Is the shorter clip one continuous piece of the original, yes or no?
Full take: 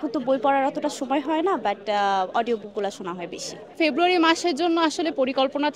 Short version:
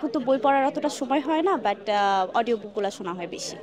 yes